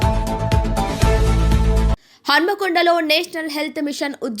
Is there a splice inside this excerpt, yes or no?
yes